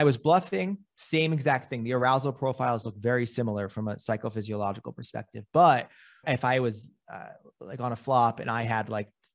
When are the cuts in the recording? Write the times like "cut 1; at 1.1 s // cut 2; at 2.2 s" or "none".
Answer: cut 1; at 6.2 s